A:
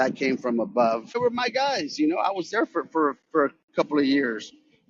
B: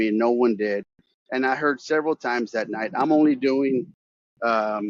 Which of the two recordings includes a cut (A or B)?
A